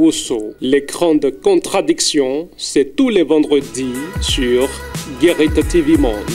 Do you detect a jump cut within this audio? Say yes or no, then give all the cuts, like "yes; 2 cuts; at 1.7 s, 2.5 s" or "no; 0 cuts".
no; 0 cuts